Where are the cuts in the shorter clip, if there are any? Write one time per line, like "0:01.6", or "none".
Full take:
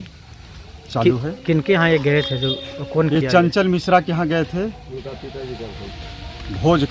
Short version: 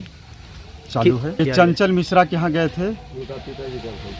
0:01.4